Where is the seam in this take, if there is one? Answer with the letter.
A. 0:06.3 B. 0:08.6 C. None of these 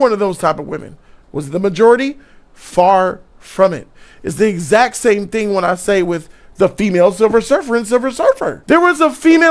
B